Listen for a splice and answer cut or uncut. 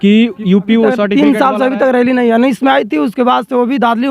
cut